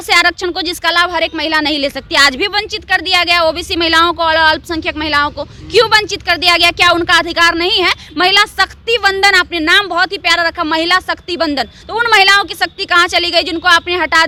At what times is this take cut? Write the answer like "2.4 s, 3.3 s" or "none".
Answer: none